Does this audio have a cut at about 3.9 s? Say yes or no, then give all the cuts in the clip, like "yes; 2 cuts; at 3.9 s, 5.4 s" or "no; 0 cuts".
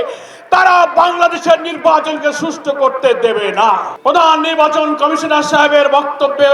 yes; 1 cut; at 3.9 s